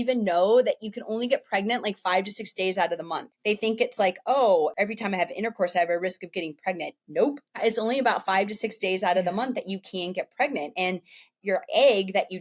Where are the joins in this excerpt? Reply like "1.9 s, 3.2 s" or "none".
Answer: 3.3 s